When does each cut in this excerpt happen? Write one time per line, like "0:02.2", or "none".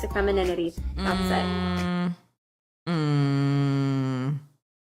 none